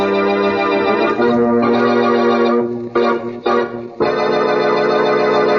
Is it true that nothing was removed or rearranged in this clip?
yes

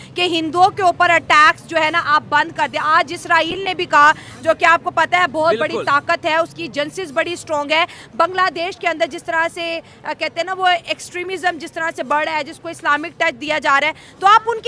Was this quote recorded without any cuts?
yes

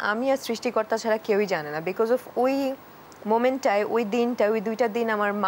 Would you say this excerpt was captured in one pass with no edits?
yes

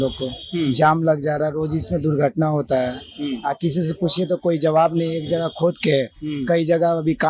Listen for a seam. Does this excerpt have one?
no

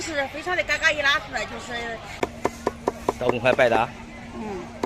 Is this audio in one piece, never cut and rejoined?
no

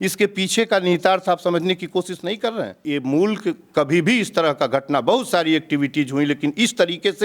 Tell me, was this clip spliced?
yes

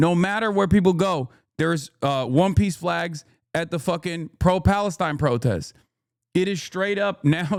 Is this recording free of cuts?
yes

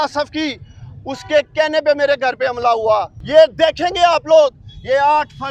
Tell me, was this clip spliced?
yes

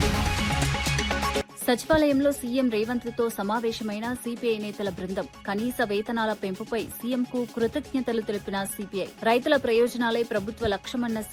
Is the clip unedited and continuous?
no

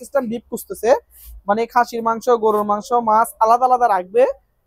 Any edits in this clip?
no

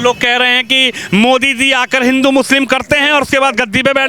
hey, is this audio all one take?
yes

